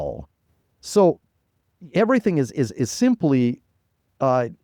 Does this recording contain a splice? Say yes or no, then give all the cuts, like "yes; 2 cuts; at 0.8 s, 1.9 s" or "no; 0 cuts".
no; 0 cuts